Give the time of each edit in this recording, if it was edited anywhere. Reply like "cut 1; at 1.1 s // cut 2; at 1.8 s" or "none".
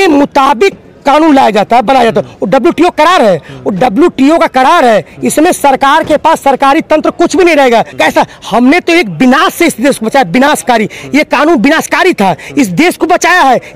cut 1; at 7.9 s